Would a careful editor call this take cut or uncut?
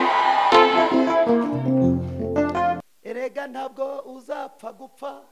cut